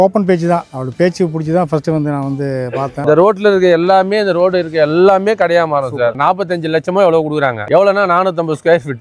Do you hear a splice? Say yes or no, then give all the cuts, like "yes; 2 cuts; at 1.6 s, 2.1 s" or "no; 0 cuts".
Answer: yes; 3 cuts; at 2.9 s, 6.1 s, 7.6 s